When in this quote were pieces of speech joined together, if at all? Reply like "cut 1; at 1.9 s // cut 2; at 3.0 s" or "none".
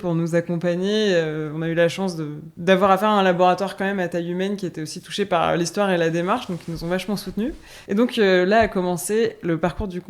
cut 1; at 2.4 s // cut 2; at 7.7 s